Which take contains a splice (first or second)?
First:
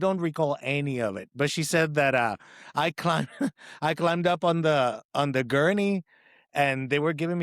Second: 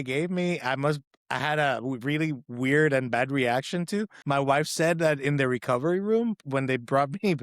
second